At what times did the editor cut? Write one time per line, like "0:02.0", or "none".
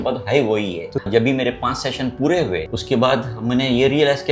0:01.0
0:02.7